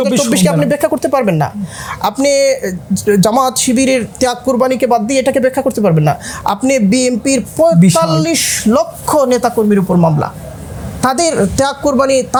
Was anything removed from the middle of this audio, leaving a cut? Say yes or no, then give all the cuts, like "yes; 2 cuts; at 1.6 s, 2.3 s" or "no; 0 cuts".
no; 0 cuts